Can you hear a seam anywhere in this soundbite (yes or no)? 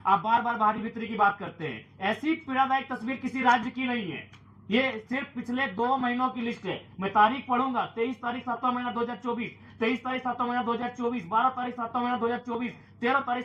no